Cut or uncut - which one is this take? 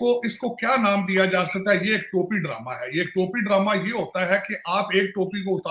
uncut